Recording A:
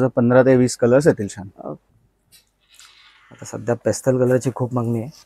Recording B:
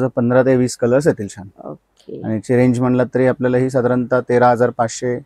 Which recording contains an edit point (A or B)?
A